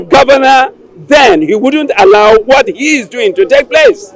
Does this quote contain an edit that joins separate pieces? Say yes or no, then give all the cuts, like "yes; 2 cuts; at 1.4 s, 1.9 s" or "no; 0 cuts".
no; 0 cuts